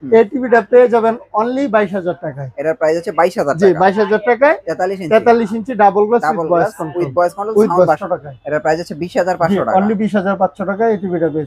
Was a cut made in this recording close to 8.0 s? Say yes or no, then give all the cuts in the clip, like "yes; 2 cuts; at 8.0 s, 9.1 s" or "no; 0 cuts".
yes; 1 cut; at 8.0 s